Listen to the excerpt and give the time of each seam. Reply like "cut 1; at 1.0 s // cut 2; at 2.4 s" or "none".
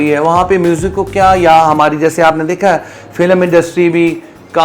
none